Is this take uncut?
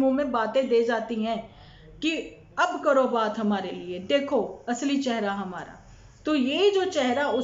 yes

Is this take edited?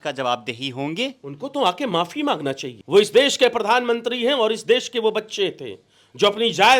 yes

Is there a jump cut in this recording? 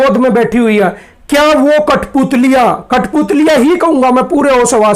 no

